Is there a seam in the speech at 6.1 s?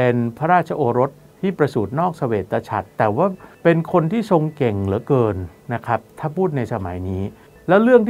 no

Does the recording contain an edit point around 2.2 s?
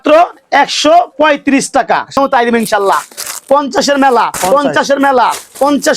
yes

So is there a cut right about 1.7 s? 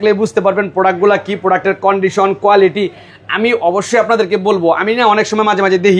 no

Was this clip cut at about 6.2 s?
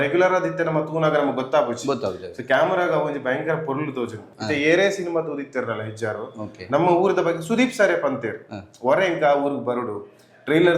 no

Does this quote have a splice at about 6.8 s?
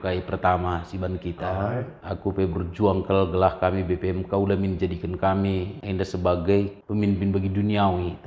yes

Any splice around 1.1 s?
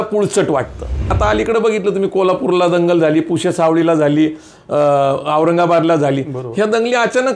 yes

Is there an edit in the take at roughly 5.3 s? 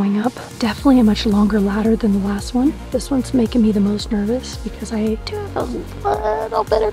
yes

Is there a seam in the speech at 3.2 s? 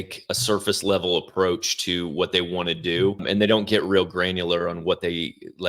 yes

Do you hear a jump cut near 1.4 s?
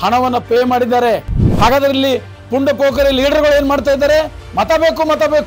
yes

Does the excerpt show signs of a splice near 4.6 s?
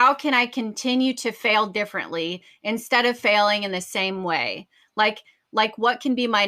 no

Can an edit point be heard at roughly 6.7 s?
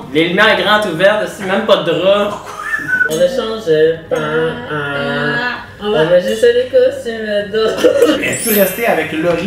no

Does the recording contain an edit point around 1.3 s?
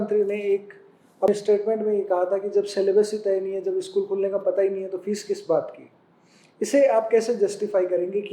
yes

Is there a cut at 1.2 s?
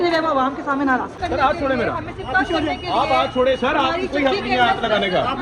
yes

